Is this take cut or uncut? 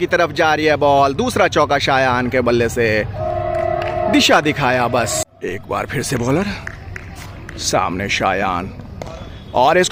uncut